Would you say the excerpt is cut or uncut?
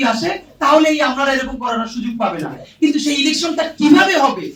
uncut